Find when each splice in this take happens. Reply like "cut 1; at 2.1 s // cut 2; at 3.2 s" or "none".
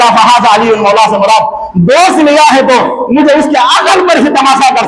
none

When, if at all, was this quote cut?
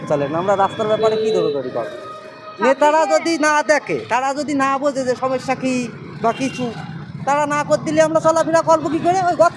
none

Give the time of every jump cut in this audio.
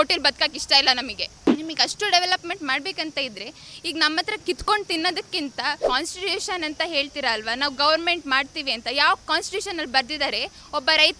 cut 1; at 1.3 s // cut 2; at 5.8 s

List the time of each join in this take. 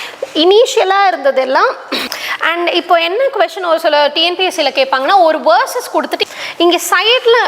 cut 1; at 2.1 s // cut 2; at 6.2 s

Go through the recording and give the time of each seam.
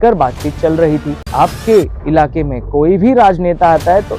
cut 1; at 1.2 s

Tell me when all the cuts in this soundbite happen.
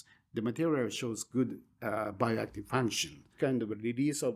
cut 1; at 3.3 s

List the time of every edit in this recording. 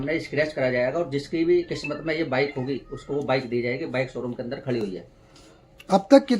none

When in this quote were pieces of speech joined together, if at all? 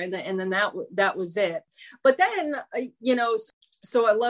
cut 1; at 1.7 s // cut 2; at 3.4 s

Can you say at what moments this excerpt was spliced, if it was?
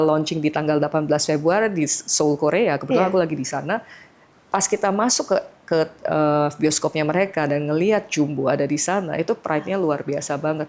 none

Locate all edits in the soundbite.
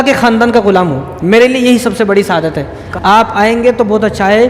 cut 1; at 2.8 s

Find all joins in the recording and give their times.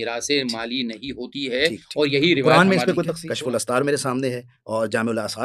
cut 1; at 3.2 s

